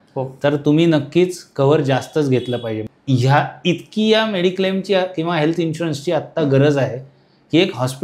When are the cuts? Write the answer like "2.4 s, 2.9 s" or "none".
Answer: 2.9 s